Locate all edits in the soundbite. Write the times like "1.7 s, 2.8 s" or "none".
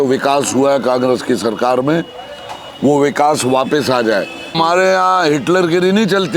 4.6 s